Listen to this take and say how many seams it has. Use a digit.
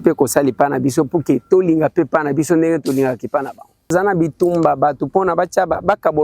1